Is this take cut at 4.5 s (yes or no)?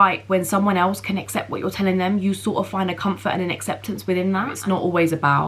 yes